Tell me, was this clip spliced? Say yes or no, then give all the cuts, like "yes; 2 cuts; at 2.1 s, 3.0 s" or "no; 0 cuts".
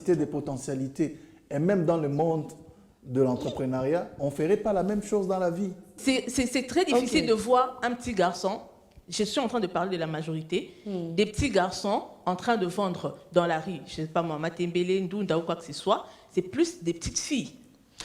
yes; 1 cut; at 5.9 s